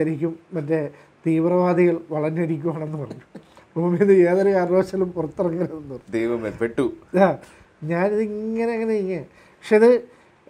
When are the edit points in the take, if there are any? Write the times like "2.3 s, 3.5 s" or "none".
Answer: none